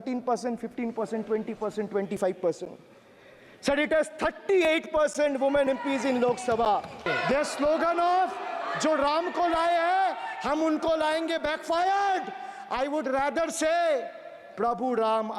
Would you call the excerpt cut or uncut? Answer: cut